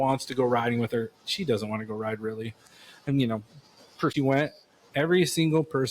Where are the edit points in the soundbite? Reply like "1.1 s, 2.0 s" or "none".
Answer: 4.1 s